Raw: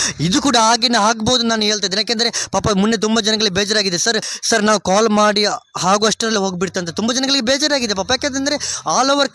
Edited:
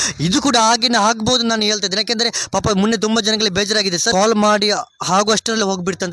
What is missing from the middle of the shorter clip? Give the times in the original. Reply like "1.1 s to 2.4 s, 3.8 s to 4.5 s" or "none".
4.1 s to 4.8 s